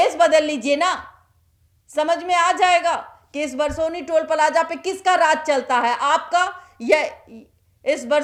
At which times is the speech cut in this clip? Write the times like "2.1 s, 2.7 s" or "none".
none